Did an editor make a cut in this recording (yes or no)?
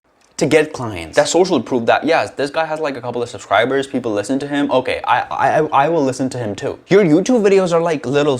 yes